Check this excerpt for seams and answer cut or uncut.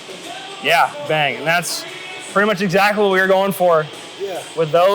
cut